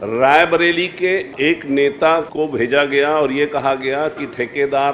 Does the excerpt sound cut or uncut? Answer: cut